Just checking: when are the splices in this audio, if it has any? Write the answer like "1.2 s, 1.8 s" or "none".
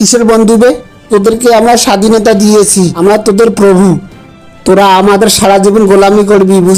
none

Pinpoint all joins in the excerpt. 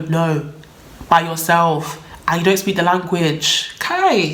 none

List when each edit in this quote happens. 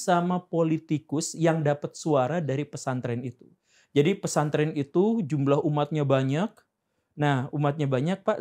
none

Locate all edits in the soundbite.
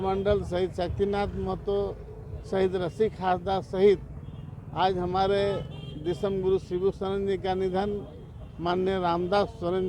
none

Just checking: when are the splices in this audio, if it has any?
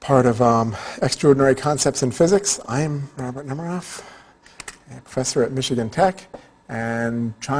2.8 s

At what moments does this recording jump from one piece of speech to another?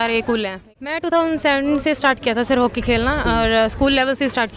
1.1 s

